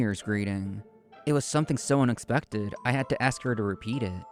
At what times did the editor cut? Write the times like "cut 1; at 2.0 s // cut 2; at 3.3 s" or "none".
none